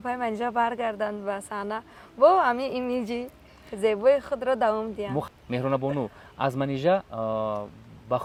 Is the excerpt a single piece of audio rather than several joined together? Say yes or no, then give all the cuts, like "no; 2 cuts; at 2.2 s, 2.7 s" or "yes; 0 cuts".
yes; 0 cuts